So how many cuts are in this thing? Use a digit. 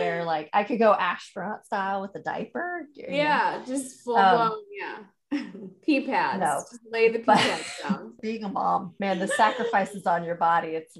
1